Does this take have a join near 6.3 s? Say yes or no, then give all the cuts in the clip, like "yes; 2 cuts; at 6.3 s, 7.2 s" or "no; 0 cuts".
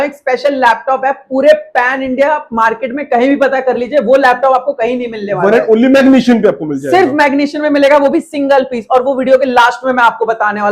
no; 0 cuts